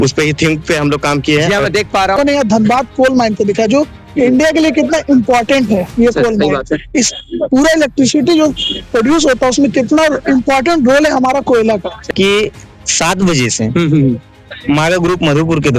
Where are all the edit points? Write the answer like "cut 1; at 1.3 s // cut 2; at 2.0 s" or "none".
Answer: cut 1; at 2.2 s // cut 2; at 12.1 s